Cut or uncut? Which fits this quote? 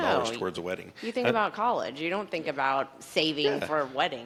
uncut